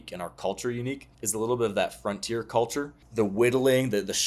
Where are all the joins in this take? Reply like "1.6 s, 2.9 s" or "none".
1.1 s, 3.0 s